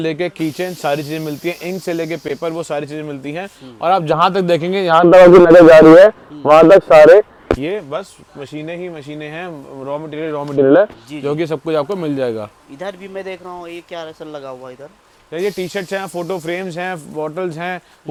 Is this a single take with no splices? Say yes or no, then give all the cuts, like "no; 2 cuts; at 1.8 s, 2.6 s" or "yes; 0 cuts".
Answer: yes; 0 cuts